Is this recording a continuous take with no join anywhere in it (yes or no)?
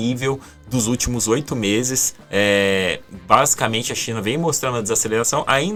yes